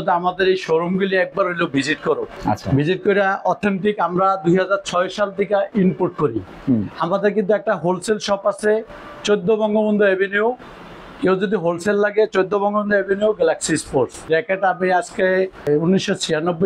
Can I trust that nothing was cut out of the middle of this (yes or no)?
no